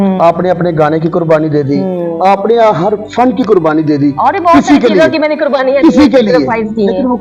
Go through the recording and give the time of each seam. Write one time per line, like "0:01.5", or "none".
none